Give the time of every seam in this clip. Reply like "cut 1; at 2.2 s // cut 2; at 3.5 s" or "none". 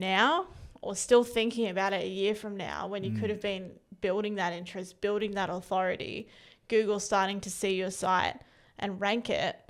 none